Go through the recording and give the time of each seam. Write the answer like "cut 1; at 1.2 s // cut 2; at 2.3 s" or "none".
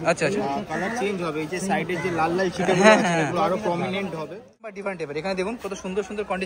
cut 1; at 4.6 s

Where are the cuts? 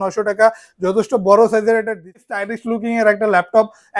cut 1; at 2.2 s

